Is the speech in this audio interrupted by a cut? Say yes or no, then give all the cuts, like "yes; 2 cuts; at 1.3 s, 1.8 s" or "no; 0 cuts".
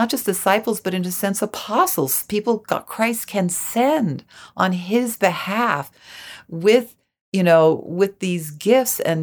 no; 0 cuts